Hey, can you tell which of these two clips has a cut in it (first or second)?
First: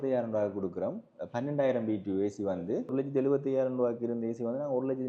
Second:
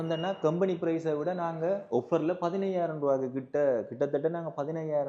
first